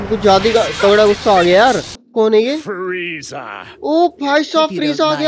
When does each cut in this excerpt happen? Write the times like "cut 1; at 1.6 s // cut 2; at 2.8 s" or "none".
cut 1; at 1.9 s